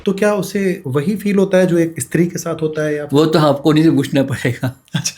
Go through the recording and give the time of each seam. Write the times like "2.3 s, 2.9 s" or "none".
0.8 s, 1.9 s